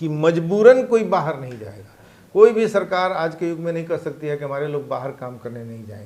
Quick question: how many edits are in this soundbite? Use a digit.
0